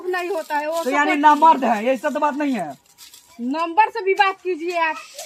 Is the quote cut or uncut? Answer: uncut